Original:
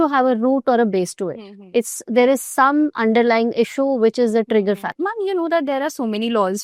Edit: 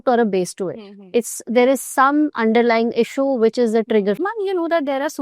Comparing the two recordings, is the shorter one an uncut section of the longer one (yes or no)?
no